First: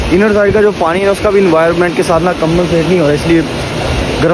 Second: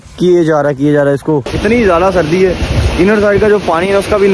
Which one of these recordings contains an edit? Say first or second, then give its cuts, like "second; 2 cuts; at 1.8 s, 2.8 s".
second; 1 cut; at 1.5 s